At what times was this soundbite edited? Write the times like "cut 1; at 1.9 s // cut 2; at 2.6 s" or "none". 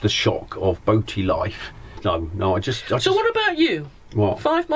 cut 1; at 1.9 s